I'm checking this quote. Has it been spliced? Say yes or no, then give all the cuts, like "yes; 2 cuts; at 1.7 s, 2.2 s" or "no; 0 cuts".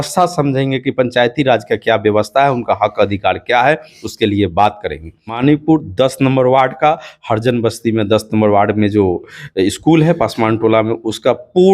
yes; 1 cut; at 5.4 s